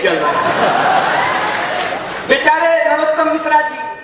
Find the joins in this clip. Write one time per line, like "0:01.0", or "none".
none